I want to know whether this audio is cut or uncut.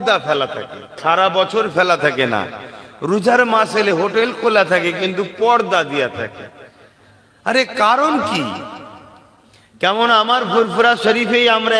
cut